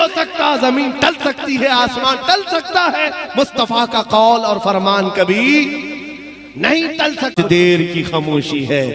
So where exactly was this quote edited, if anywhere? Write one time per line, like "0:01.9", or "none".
0:07.3